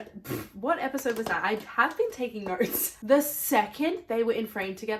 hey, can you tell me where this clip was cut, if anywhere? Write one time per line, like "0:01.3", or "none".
0:03.0